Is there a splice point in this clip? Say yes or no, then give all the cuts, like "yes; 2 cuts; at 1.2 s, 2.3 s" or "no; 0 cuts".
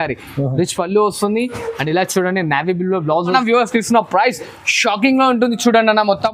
yes; 1 cut; at 3.3 s